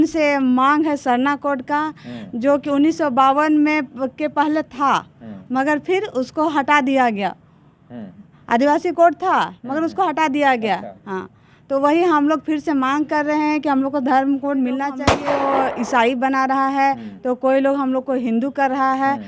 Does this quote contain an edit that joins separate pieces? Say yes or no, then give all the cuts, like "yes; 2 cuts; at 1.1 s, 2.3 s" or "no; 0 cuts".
yes; 1 cut; at 15.1 s